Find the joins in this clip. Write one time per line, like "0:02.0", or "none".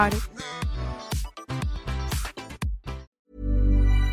0:03.2